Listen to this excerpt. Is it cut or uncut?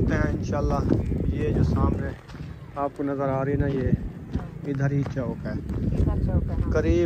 uncut